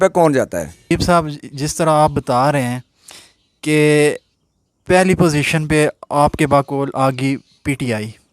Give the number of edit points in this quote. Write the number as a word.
one